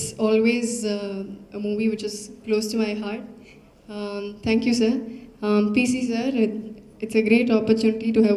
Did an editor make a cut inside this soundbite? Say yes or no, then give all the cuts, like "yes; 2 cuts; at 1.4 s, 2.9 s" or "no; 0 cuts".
no; 0 cuts